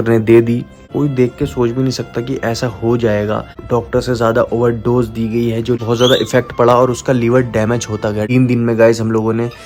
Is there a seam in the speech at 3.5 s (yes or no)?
yes